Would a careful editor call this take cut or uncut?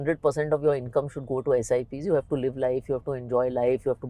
uncut